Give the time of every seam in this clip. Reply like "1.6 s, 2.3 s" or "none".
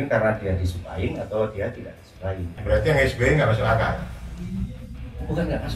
2.5 s